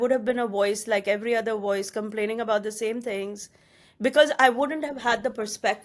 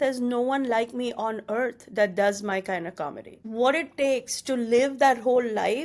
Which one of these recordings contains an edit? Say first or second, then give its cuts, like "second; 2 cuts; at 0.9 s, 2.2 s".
second; 1 cut; at 3.4 s